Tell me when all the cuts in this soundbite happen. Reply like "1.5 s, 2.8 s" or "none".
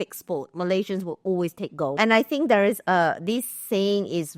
1.9 s